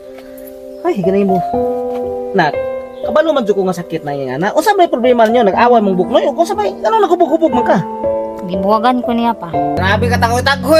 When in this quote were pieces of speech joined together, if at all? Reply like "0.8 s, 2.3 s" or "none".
9.8 s